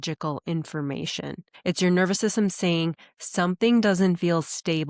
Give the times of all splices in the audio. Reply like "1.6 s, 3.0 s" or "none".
1.4 s